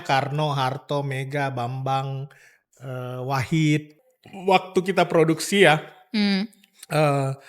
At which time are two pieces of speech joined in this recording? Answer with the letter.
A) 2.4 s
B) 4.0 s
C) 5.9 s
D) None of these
B